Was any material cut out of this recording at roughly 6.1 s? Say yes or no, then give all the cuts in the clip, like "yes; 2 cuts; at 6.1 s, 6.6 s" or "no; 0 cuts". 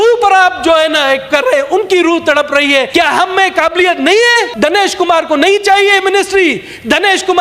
no; 2 cuts; at 2.9 s, 4.5 s